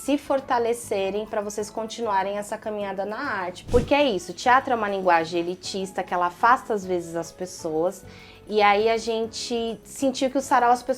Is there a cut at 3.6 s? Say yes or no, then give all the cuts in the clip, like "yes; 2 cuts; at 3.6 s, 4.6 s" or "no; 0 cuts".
yes; 1 cut; at 3.6 s